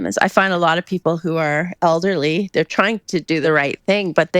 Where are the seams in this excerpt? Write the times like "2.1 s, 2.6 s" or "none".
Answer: 3.4 s